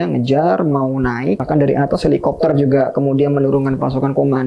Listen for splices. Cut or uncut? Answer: cut